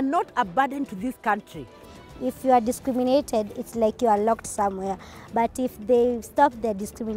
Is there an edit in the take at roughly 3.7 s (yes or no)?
no